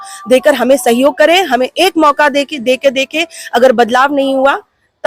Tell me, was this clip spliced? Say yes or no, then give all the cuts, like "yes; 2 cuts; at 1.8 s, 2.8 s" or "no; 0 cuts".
no; 0 cuts